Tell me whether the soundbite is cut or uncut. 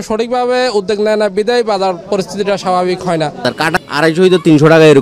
cut